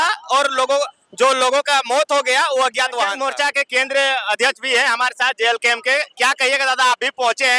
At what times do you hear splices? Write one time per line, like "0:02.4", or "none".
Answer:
0:03.2